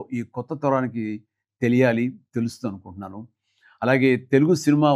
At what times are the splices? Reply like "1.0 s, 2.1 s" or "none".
none